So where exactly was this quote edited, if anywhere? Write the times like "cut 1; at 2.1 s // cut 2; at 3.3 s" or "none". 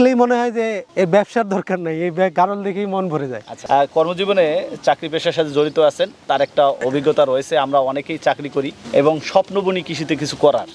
none